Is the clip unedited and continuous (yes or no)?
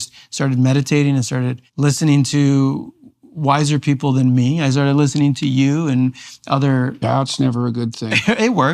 no